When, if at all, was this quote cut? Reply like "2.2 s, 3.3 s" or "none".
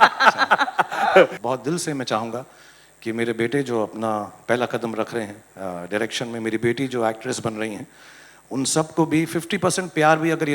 1.4 s